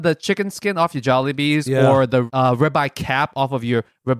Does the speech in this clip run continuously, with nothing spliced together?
no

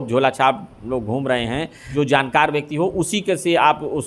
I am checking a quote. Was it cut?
yes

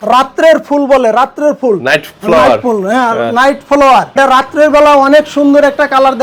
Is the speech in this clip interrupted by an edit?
yes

